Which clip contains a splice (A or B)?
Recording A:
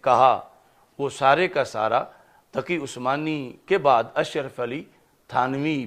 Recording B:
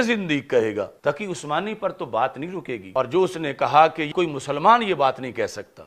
B